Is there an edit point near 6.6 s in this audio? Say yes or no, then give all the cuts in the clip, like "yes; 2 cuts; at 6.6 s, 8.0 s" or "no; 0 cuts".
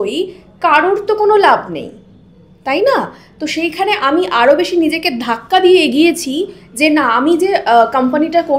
no; 0 cuts